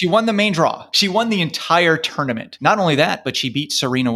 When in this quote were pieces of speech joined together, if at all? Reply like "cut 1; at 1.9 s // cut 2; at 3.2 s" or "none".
cut 1; at 0.9 s // cut 2; at 2.5 s